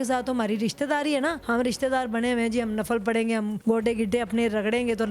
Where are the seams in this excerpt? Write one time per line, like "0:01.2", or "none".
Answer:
0:01.4
0:03.6

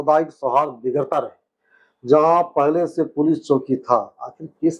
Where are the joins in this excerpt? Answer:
none

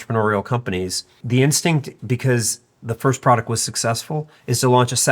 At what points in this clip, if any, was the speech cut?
0:01.2

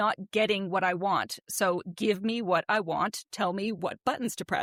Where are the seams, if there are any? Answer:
none

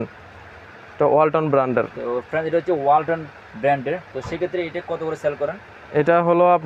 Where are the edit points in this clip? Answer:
none

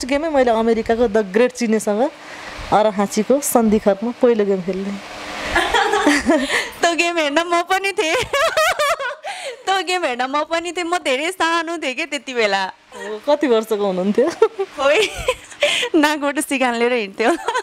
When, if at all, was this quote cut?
none

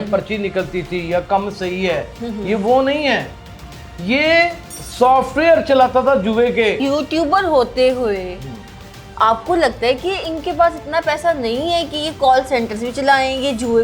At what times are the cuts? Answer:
0:06.8

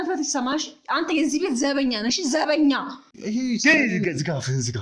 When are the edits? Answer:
0:03.1

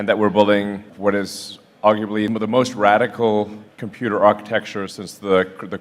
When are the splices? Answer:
0:00.9
0:02.3

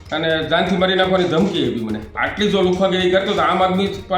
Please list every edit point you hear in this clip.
0:02.2

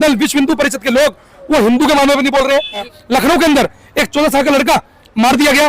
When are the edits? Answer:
0:02.9

